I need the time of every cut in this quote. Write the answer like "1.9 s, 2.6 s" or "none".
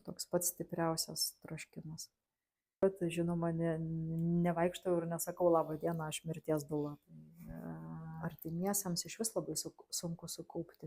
2.8 s, 8.2 s